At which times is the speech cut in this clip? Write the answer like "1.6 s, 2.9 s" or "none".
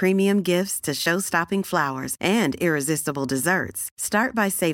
none